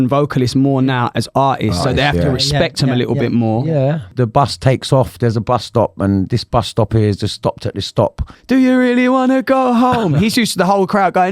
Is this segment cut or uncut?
cut